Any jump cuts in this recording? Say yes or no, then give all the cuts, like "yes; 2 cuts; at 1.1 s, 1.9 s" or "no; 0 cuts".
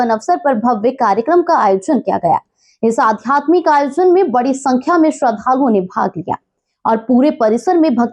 no; 0 cuts